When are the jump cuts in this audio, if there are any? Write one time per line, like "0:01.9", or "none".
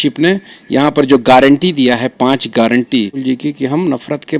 0:03.2